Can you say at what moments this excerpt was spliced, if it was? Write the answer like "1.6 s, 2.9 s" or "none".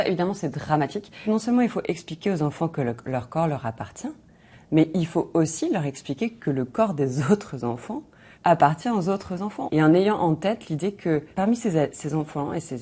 1.2 s, 9.6 s